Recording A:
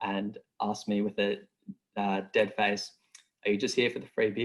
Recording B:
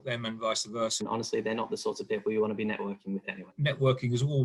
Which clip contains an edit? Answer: B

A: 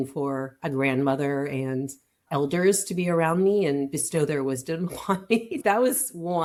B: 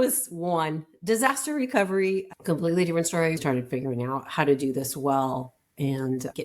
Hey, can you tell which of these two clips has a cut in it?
B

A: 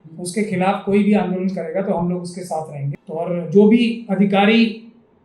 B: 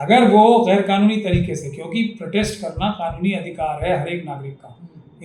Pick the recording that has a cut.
A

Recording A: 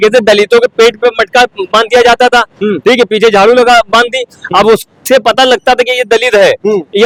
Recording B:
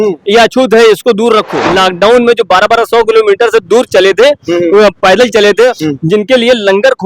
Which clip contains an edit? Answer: B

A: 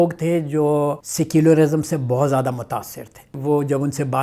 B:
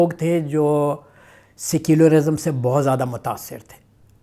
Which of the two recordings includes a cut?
A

